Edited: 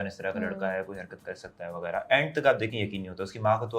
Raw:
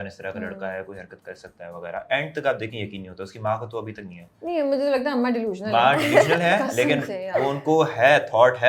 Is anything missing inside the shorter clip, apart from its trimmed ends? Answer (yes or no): no